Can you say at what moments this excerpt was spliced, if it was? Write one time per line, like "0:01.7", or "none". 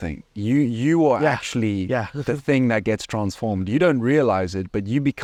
none